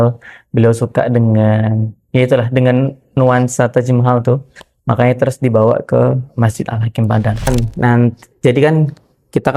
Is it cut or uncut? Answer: cut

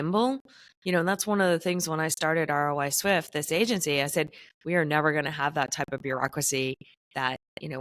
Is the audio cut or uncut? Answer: uncut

